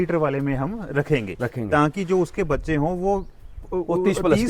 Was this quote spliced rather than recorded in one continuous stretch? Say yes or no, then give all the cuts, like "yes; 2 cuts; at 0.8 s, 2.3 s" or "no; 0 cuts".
no; 0 cuts